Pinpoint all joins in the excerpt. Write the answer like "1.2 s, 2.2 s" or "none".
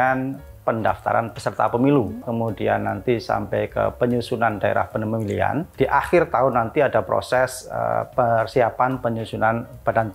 2.3 s, 5.6 s